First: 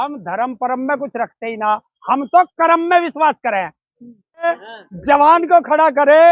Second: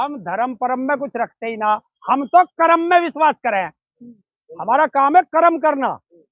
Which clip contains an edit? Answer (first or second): first